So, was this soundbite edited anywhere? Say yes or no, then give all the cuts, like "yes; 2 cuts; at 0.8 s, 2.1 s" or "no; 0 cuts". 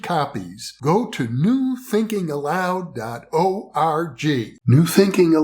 yes; 1 cut; at 4.5 s